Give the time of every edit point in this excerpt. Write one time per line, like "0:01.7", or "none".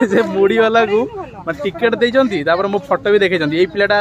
none

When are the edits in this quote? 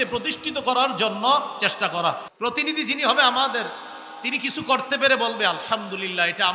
0:02.3

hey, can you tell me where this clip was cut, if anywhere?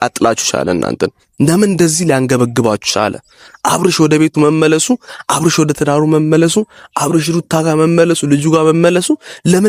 none

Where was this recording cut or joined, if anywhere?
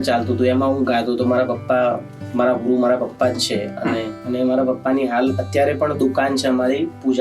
0:04.2

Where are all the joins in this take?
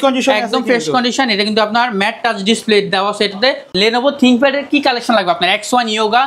0:03.7

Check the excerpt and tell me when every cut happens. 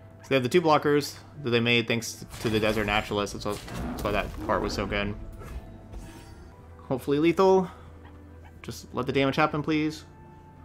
0:06.5

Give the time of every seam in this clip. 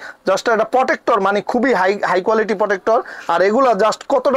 none

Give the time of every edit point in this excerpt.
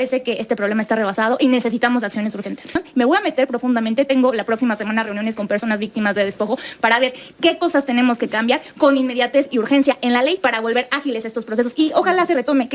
0:02.8

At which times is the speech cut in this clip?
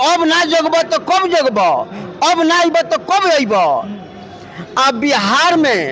none

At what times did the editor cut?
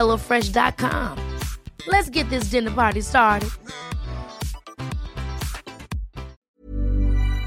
0:06.4

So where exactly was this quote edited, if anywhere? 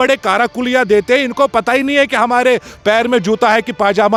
none

